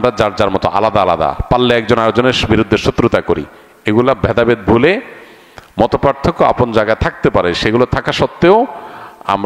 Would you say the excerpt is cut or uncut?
uncut